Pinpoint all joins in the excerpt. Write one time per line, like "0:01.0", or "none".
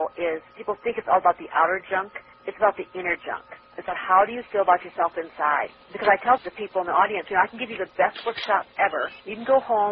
none

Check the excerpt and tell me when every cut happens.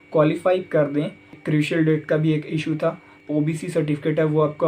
0:01.4
0:03.1

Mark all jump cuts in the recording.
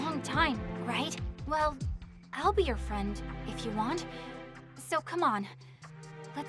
0:01.3

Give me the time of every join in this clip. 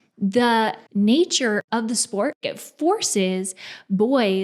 0:00.8
0:01.6
0:02.6

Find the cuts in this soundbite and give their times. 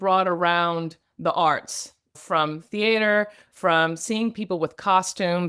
none

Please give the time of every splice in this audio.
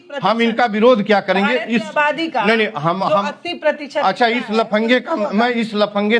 none

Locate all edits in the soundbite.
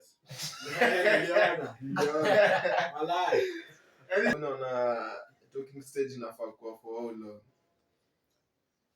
0:04.3

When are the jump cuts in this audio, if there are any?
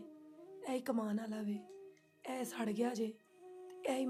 none

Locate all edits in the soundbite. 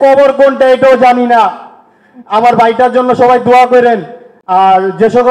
none

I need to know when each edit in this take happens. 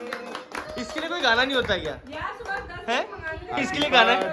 none

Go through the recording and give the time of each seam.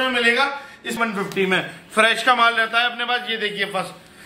0:01.0

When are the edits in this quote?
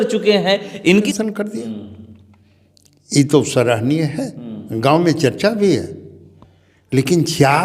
0:01.1

